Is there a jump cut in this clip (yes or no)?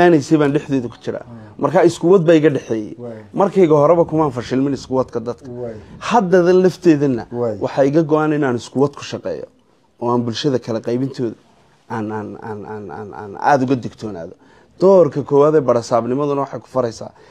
no